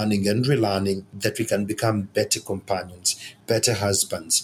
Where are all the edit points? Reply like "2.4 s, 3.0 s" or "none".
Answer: none